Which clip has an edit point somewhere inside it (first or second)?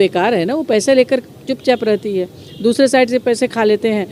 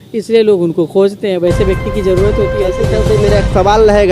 second